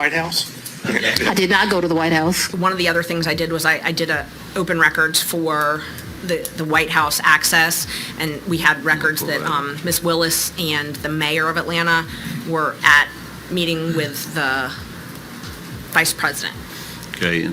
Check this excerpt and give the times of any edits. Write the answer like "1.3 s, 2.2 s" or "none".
2.5 s

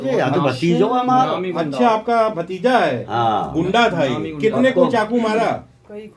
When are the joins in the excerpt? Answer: none

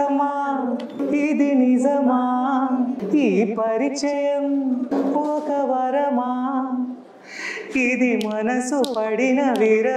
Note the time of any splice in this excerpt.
1.0 s, 3.0 s, 4.9 s

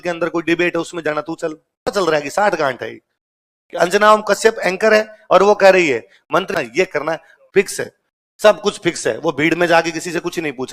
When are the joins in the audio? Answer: 1.9 s, 6.5 s

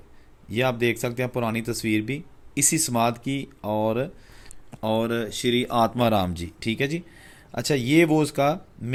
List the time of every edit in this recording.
none

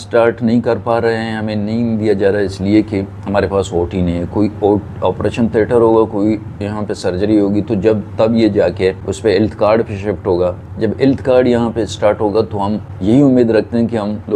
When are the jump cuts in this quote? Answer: 9.1 s, 12.9 s

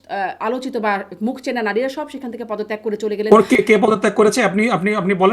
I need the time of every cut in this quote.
none

